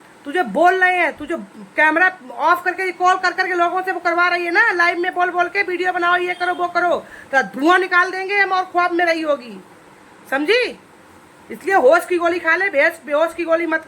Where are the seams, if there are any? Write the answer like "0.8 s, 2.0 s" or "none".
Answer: none